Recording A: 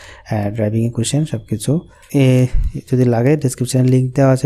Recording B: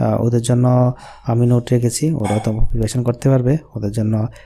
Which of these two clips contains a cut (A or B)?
A